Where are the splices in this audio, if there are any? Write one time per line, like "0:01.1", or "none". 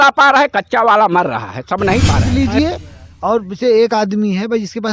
0:02.2